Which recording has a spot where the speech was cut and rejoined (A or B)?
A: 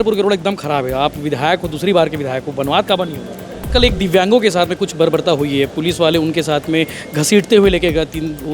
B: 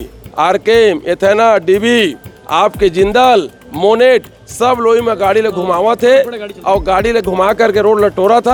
A